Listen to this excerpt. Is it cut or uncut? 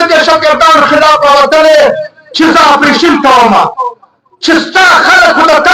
uncut